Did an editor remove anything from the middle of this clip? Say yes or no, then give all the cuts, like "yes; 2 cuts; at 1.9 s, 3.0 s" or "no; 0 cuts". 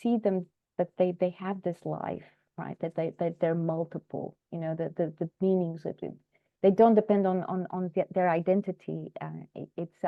no; 0 cuts